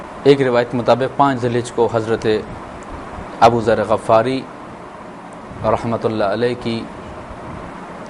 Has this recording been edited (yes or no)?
no